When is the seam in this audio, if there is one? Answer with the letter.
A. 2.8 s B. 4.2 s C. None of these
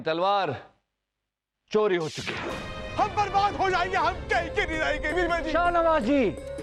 A